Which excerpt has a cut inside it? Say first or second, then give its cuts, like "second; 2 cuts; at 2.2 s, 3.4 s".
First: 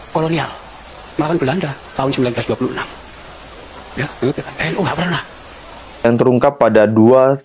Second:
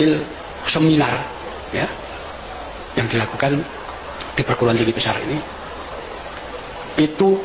first; 1 cut; at 6.1 s